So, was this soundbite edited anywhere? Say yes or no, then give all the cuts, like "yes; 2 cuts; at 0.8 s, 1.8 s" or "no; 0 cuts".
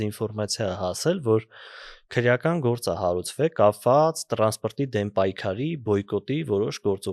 no; 0 cuts